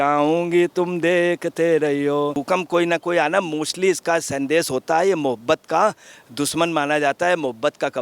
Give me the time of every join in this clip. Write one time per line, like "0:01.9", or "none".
0:02.3